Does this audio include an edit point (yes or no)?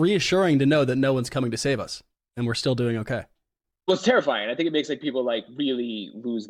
no